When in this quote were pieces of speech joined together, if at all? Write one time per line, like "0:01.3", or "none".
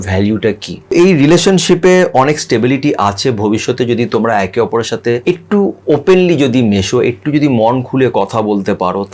0:00.9
0:05.2